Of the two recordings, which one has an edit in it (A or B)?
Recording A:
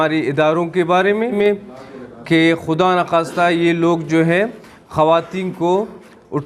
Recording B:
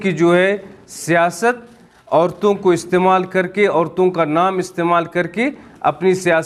A